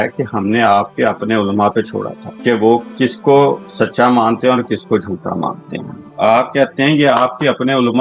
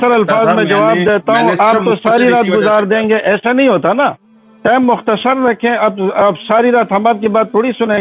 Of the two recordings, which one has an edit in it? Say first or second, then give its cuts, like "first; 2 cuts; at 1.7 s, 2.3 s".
first; 3 cuts; at 2.2 s, 2.9 s, 3.7 s